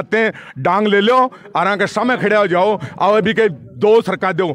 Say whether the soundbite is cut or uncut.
uncut